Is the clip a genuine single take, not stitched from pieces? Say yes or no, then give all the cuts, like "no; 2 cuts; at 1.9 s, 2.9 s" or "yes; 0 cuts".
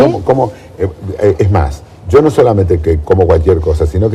no; 1 cut; at 2.7 s